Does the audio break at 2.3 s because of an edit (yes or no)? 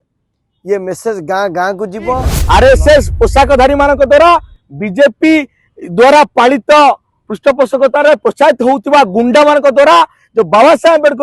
yes